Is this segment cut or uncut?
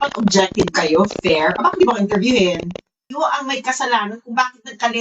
cut